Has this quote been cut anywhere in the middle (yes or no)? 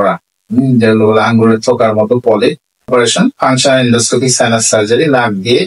yes